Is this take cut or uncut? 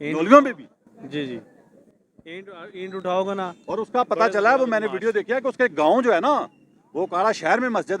uncut